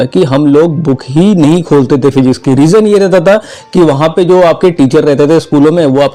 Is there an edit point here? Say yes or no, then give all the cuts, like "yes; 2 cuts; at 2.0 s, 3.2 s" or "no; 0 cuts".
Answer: no; 0 cuts